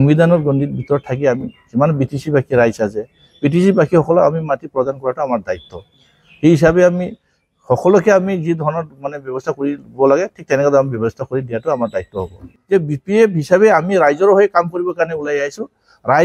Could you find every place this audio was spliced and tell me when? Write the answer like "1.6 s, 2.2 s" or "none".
12.5 s